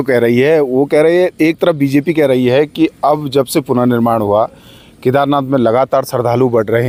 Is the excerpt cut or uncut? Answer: uncut